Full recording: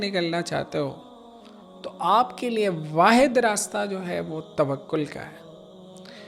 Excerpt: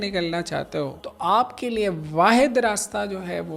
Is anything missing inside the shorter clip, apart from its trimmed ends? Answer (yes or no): yes